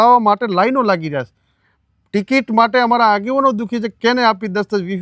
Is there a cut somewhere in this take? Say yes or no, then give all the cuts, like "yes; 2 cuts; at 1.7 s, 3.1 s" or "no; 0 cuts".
no; 0 cuts